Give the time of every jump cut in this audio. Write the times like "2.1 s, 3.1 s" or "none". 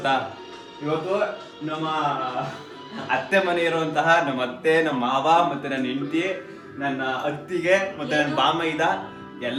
none